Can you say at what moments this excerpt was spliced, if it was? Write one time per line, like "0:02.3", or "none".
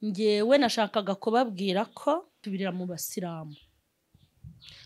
0:02.4